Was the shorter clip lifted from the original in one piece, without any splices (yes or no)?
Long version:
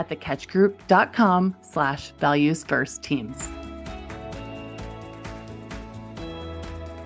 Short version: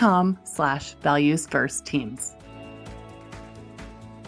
no